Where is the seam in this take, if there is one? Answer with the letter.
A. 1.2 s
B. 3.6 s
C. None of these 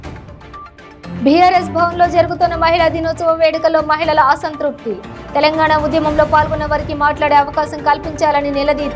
A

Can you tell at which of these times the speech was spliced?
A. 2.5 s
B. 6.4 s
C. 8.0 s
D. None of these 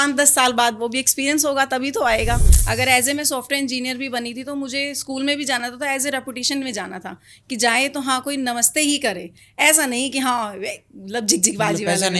A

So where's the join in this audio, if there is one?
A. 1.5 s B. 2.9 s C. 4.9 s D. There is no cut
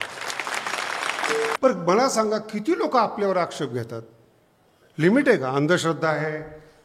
A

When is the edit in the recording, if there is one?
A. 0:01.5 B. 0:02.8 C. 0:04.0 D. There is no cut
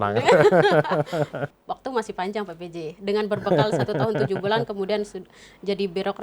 A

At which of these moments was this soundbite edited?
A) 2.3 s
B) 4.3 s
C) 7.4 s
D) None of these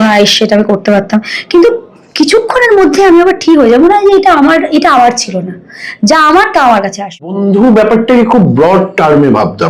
C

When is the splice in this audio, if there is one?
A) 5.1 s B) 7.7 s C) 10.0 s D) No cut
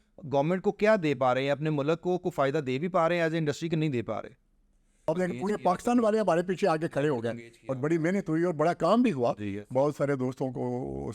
A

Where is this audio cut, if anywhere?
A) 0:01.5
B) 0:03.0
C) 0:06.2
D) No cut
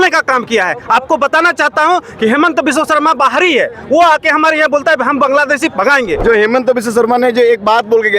C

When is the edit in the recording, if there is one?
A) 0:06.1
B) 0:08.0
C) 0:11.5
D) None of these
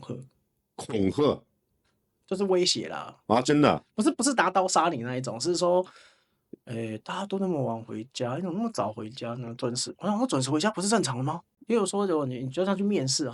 C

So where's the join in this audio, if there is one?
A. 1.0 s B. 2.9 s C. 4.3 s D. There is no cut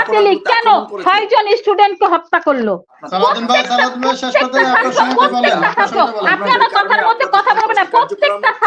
B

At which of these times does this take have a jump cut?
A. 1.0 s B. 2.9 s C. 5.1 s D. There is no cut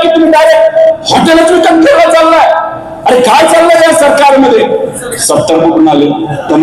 C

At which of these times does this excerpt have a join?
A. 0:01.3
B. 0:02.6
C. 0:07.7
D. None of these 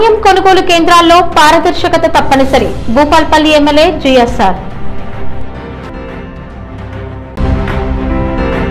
D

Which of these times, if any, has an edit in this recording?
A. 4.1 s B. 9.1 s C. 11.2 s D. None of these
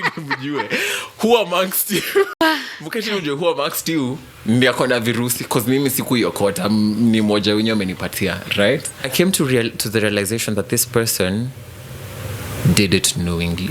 B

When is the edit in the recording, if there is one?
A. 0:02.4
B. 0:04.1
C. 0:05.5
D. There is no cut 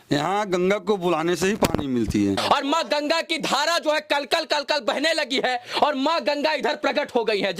A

